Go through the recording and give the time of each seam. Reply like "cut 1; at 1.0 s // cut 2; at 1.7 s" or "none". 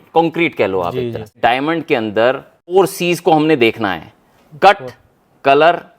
cut 1; at 1.4 s // cut 2; at 2.6 s